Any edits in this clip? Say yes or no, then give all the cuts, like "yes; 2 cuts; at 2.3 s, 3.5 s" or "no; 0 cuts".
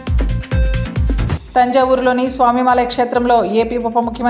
yes; 1 cut; at 1.2 s